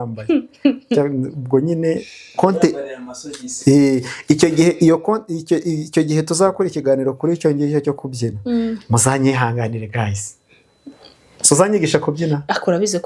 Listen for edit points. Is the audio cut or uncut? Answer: uncut